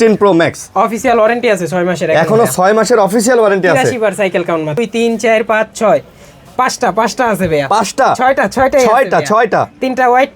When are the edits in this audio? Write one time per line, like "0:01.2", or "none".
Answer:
0:04.8